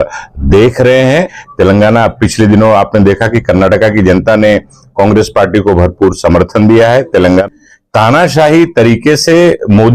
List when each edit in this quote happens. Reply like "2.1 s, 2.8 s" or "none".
1.4 s, 7.5 s